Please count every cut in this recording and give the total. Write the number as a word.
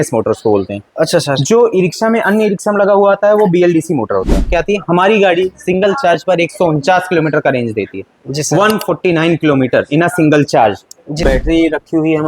two